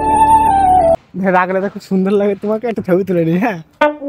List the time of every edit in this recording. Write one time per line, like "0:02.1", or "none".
0:01.0